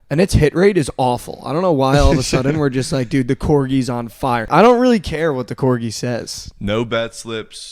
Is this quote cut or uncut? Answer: cut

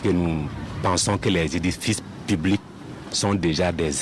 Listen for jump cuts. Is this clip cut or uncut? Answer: uncut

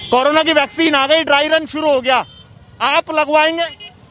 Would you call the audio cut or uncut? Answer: uncut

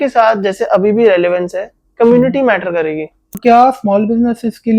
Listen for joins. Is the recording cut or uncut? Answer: cut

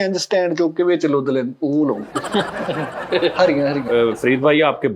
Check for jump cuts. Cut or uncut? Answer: cut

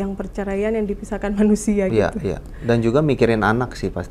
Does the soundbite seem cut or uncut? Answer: uncut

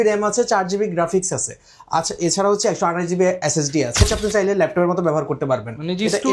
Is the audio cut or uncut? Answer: cut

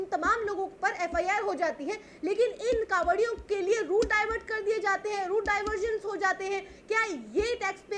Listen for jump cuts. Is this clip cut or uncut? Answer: uncut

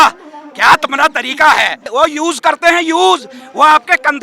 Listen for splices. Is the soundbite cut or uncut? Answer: cut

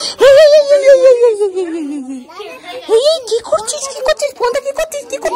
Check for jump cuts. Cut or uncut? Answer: uncut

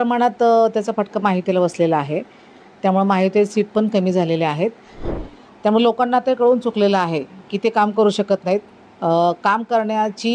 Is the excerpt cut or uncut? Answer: cut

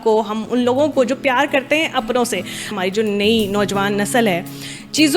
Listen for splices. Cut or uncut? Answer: cut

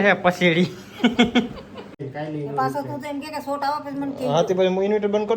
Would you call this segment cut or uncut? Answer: cut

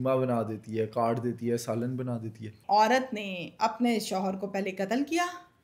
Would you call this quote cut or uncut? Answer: cut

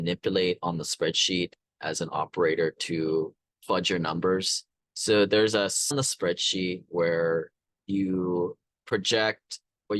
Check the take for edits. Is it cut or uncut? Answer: cut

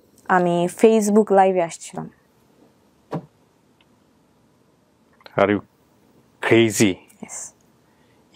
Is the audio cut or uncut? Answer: uncut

